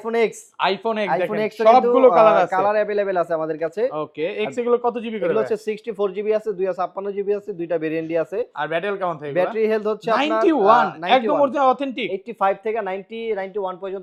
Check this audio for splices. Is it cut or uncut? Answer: uncut